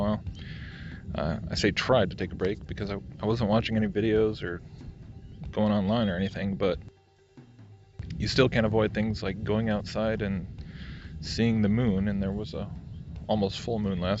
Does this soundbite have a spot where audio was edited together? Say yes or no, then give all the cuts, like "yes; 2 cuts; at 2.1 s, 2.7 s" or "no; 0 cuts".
yes; 1 cut; at 4.2 s